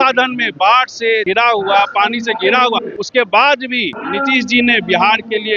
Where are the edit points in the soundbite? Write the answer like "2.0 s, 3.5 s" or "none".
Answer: 1.2 s, 3.0 s, 3.9 s